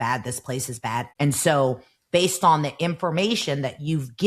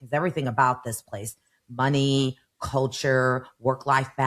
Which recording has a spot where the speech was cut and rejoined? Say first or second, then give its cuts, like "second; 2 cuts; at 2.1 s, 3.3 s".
first; 1 cut; at 1.1 s